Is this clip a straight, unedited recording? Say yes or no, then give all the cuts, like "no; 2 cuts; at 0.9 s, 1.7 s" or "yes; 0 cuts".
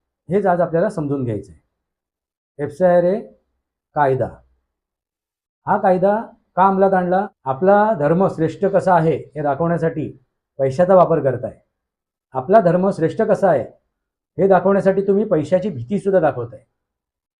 no; 1 cut; at 7.4 s